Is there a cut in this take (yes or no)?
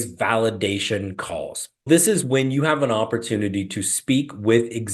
yes